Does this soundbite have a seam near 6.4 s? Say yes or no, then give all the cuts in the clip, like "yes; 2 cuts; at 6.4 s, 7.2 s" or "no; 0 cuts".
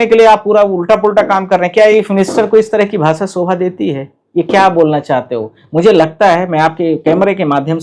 no; 1 cut; at 2.0 s